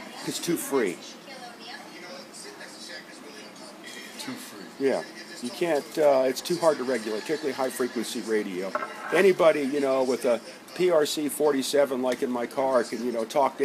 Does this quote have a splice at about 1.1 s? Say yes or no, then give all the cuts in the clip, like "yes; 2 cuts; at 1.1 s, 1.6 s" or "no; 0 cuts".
yes; 1 cut; at 1.1 s